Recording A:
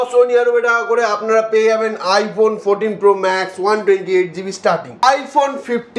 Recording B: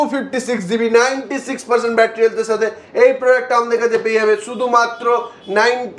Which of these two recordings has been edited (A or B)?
A